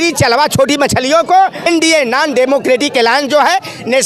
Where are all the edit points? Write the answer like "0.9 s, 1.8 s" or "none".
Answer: 1.7 s

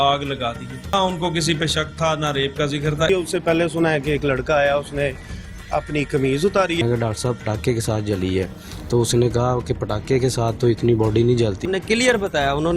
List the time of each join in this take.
0.9 s, 3.1 s, 6.8 s, 11.6 s

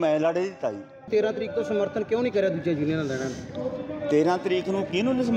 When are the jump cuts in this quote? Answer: 1.1 s

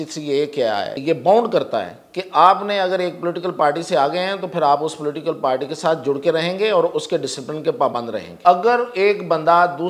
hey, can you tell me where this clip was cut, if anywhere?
1.0 s, 8.3 s

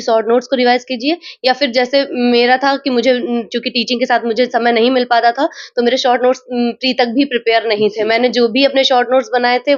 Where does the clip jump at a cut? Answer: none

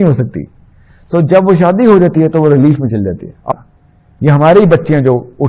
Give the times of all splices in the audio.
3.4 s

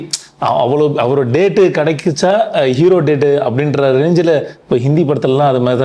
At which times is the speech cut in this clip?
none

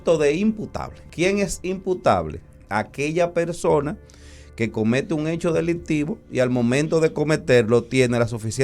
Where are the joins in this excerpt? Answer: 1.0 s

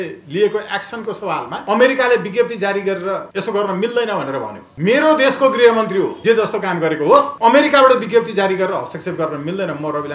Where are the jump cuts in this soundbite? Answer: 1.5 s, 3.3 s, 4.6 s, 6.1 s, 7.3 s

